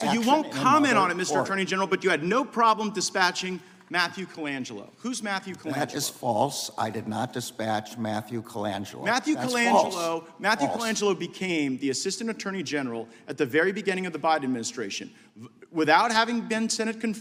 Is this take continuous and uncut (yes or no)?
yes